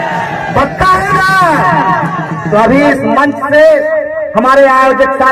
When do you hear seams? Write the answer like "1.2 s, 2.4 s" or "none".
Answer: none